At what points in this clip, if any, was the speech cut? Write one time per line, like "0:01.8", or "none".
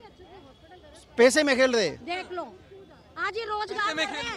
none